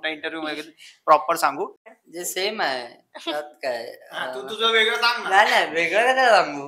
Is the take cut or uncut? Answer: cut